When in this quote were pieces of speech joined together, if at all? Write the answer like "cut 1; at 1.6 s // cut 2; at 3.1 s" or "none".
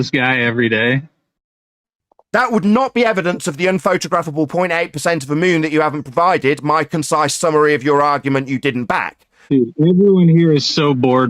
cut 1; at 9.4 s